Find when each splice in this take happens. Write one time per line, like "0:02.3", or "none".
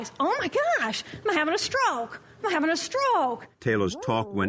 0:03.5